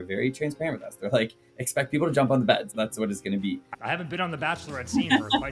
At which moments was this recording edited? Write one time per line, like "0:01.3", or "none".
0:03.8